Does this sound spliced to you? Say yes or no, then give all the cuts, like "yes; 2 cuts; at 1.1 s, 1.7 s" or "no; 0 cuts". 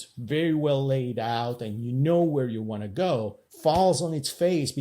yes; 1 cut; at 3.4 s